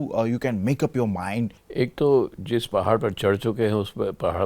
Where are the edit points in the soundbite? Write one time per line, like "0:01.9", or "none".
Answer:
0:01.6